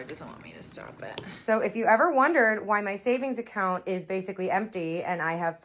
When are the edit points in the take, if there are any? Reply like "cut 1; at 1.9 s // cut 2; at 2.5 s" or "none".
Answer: cut 1; at 1.3 s